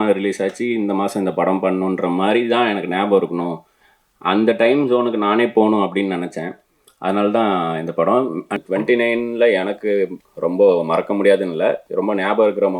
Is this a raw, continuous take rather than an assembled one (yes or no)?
no